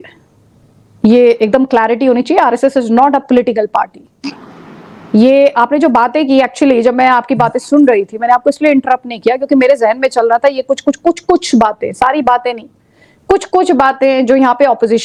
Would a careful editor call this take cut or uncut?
uncut